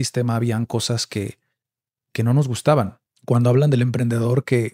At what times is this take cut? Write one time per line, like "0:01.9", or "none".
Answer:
0:03.1